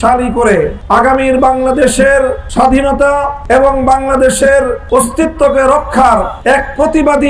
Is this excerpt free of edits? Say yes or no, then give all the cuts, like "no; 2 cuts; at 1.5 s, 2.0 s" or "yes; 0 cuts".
no; 5 cuts; at 1.0 s, 2.4 s, 3.4 s, 4.8 s, 6.3 s